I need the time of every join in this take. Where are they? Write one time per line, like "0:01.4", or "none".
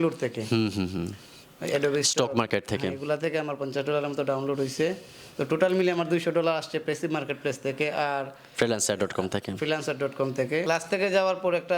0:10.6